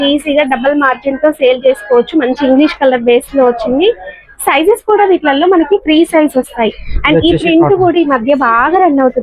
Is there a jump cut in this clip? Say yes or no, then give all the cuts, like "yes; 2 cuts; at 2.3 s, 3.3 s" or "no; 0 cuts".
no; 0 cuts